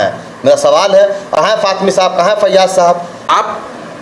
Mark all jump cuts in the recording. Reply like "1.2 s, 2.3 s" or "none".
1.2 s, 3.3 s